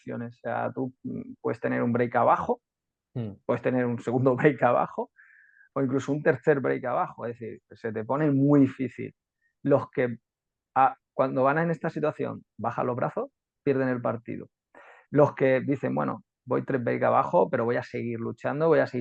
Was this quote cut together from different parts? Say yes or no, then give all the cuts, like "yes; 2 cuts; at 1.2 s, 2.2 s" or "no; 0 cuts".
no; 0 cuts